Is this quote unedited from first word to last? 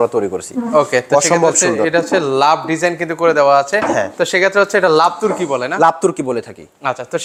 yes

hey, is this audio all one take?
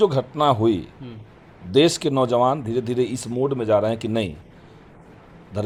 yes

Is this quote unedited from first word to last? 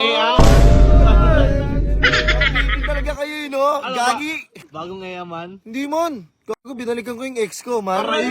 no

